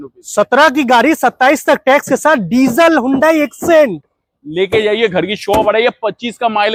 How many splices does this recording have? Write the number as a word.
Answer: zero